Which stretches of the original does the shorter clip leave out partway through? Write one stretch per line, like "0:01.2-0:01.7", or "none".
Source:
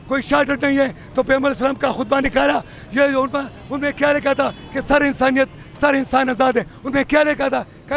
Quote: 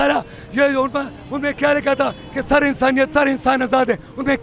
0:05.5-0:05.8